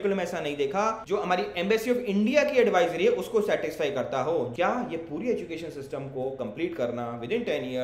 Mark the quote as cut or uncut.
cut